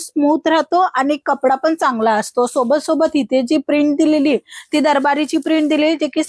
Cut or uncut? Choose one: uncut